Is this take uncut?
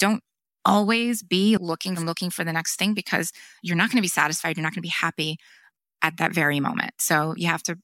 no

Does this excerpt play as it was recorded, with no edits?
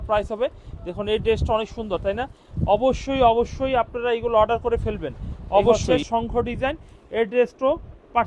no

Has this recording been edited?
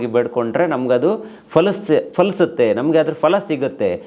no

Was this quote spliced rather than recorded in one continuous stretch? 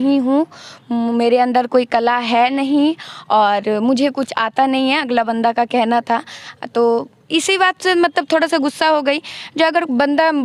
no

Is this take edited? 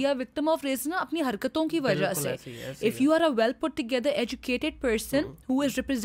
no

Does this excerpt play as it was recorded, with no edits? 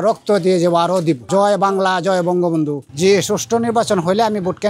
no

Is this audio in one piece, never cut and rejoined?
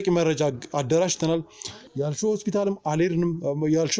yes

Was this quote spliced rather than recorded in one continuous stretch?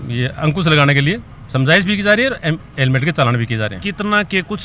no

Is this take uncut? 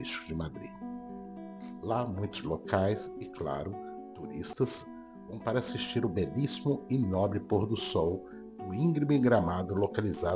yes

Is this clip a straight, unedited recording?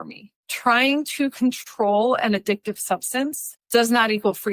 yes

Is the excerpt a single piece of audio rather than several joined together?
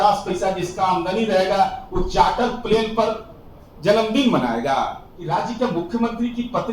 no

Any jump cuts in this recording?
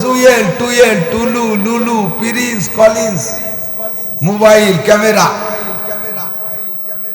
no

